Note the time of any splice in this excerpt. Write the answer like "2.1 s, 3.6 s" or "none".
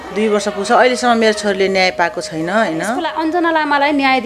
3.1 s